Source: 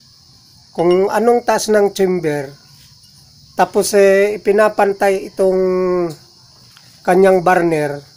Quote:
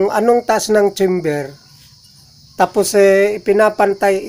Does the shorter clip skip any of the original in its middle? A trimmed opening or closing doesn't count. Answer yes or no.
no